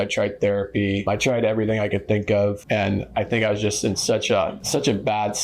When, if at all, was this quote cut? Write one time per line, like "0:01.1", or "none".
0:01.1
0:02.6
0:04.6